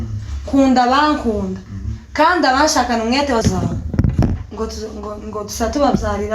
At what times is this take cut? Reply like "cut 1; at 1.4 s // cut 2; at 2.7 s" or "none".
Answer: cut 1; at 3.4 s